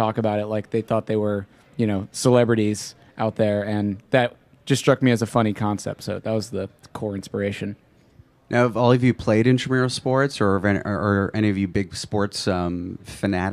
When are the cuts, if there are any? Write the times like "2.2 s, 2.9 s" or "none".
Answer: 6.8 s